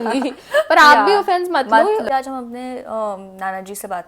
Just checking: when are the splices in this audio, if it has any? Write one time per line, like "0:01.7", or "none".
0:02.0